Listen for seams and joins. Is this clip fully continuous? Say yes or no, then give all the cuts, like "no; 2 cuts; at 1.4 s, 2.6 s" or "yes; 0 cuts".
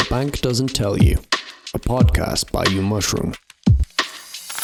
yes; 0 cuts